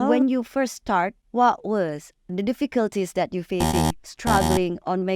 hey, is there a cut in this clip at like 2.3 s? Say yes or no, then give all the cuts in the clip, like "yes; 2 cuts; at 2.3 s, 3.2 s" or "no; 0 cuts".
yes; 2 cuts; at 1.2 s, 2.3 s